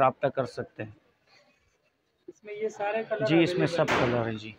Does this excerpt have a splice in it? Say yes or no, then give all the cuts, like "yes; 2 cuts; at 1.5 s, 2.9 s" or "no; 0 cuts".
no; 0 cuts